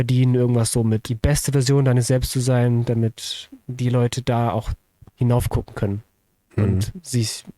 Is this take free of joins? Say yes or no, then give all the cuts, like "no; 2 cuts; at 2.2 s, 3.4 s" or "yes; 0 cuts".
no; 1 cut; at 1.1 s